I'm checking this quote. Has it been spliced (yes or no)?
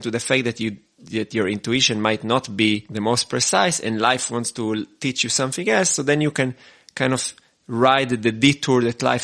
no